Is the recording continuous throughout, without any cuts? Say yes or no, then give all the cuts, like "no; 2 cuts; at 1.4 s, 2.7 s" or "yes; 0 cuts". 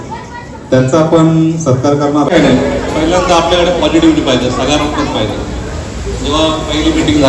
no; 1 cut; at 2.3 s